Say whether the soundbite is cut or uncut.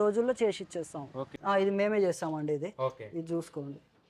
cut